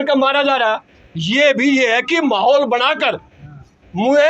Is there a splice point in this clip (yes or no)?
no